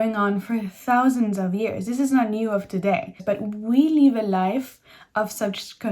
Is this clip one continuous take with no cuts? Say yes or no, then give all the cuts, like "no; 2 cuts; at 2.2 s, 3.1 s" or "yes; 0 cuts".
no; 1 cut; at 3.2 s